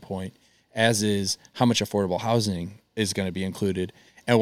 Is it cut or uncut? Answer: uncut